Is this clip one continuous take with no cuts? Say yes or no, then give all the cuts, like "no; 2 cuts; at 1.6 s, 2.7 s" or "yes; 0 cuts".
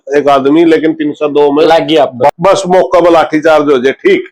no; 1 cut; at 2.3 s